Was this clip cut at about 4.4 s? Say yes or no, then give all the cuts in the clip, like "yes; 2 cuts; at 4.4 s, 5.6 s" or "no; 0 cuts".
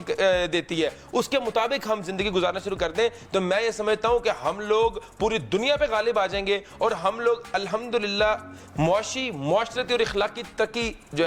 no; 0 cuts